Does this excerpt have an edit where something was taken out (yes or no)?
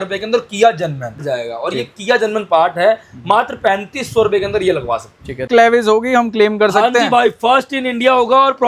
yes